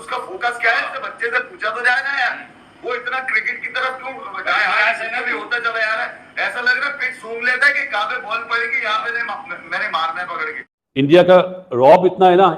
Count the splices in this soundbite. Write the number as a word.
one